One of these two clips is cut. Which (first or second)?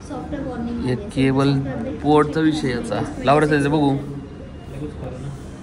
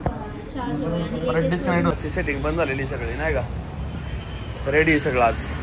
second